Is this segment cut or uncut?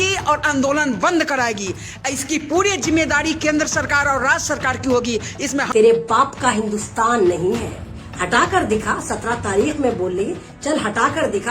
cut